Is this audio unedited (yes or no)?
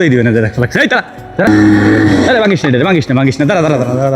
no